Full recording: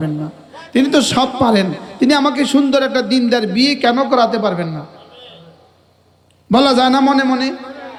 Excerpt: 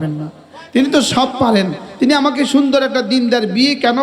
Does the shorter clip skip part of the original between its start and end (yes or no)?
no